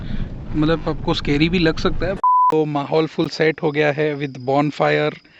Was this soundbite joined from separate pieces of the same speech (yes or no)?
yes